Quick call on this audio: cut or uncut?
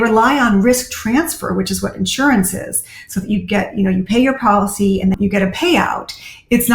cut